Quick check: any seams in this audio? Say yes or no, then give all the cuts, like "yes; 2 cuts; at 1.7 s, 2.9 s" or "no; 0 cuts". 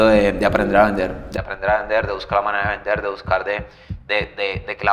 no; 0 cuts